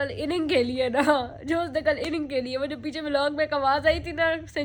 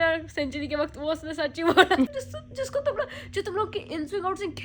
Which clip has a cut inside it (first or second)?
second